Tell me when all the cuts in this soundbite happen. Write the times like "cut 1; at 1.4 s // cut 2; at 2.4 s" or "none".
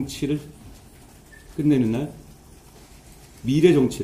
none